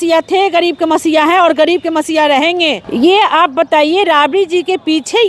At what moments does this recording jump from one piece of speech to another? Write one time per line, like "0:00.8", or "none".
0:02.8